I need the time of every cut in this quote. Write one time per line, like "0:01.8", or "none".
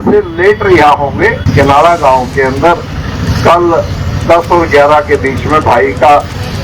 0:01.5